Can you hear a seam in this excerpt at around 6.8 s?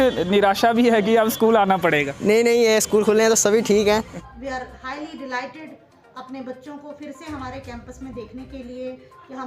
no; 1 cut; at 4.2 s

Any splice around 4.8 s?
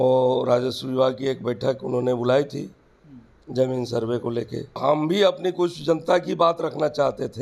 yes; 1 cut; at 4.8 s

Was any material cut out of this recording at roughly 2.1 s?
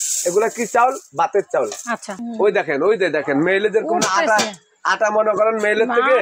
yes; 1 cut; at 2.1 s

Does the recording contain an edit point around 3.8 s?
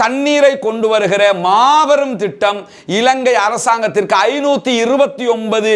no; 0 cuts

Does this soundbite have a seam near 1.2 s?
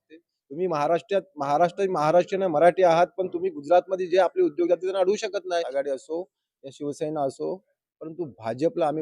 no; 1 cut; at 5.7 s

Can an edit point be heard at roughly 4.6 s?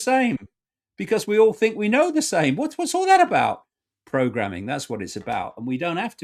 no; 0 cuts

